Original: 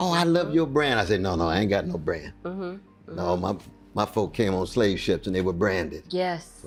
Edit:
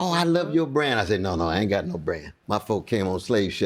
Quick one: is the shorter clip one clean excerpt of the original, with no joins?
no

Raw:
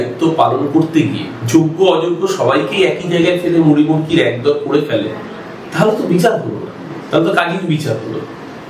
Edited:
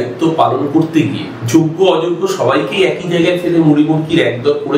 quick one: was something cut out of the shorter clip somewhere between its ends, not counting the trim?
no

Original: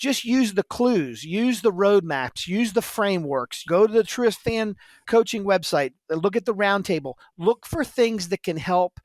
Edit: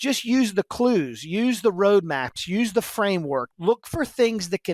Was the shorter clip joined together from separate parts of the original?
yes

